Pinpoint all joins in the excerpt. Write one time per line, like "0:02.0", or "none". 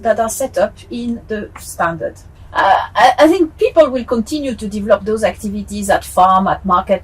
0:02.4